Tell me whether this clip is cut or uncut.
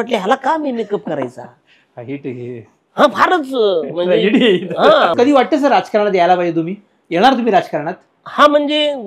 cut